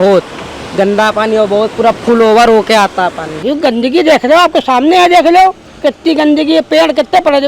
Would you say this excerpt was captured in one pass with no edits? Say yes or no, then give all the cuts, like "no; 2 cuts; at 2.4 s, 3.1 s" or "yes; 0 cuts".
no; 2 cuts; at 3.3 s, 5.7 s